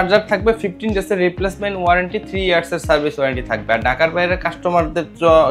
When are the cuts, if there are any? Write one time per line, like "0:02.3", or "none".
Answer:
none

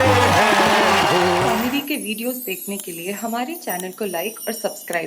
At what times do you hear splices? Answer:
0:01.5

